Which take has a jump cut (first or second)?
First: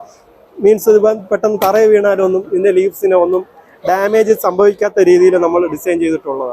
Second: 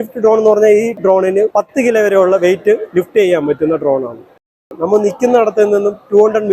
second